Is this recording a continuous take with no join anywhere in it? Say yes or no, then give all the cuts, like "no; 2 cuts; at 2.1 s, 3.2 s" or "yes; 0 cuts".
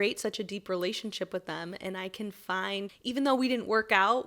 no; 1 cut; at 3.0 s